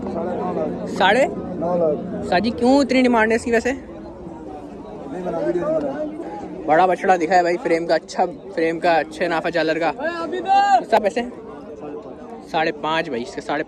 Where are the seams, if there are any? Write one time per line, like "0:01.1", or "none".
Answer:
0:06.2
0:11.0

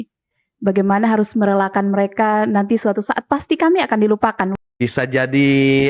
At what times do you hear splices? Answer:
0:04.5

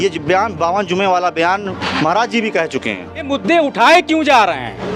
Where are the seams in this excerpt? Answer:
0:03.3

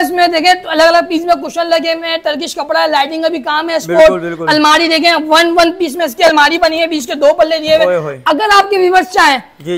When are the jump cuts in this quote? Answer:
none

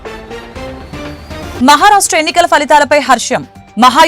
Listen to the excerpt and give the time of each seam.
0:01.4

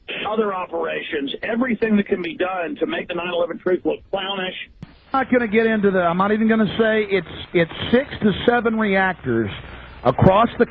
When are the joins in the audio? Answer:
0:04.8

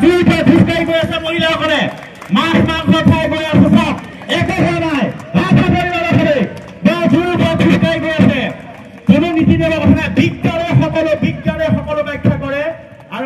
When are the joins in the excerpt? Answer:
none

